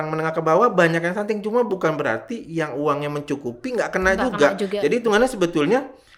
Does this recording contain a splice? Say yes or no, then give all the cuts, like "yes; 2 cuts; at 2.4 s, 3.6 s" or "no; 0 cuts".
no; 0 cuts